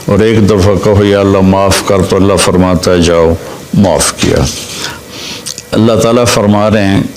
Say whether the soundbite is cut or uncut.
cut